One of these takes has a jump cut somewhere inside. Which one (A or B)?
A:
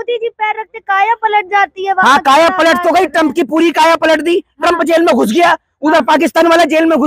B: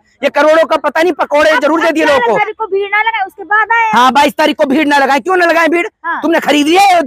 B